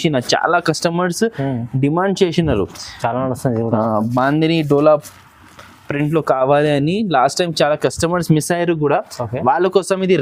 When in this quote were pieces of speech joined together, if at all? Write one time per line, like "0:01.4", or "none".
none